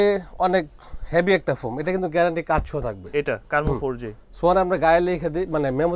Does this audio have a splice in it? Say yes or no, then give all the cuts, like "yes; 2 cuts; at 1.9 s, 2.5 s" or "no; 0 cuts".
no; 0 cuts